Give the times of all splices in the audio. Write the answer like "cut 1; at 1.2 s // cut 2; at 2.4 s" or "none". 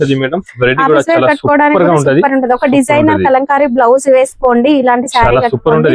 none

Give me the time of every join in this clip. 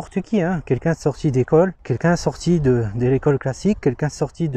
none

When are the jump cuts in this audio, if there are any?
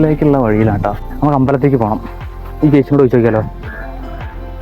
none

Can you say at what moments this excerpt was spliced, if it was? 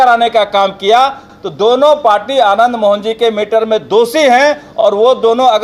none

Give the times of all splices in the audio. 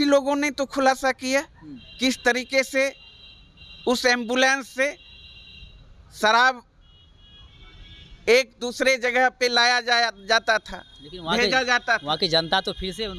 none

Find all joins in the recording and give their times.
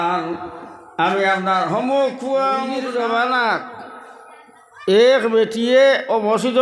cut 1; at 2.8 s

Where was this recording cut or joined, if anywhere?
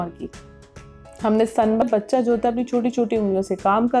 cut 1; at 1.8 s

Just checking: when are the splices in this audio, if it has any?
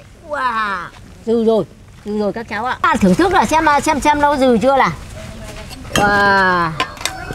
none

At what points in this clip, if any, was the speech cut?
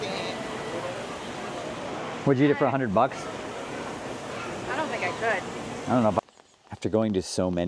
cut 1; at 6.2 s

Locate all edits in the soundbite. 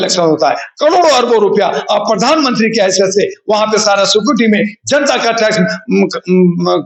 none

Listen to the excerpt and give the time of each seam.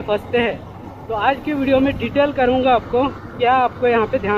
none

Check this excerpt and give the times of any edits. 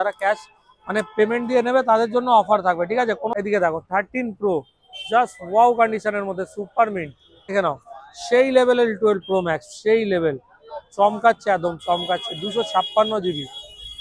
cut 1; at 3.2 s // cut 2; at 7.5 s

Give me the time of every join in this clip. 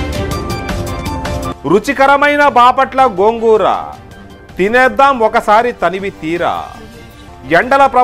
cut 1; at 1.5 s

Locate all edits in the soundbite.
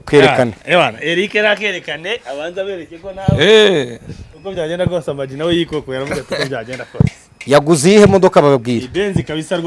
none

